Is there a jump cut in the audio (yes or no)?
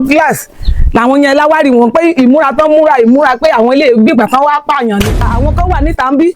yes